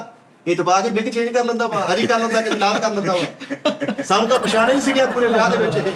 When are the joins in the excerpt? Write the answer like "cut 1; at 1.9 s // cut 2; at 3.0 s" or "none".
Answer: none